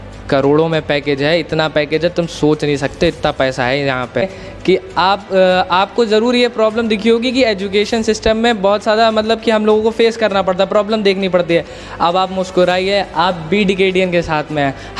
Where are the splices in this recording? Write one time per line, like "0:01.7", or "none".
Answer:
0:04.4